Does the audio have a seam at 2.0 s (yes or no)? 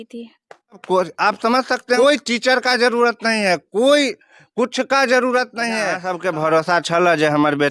yes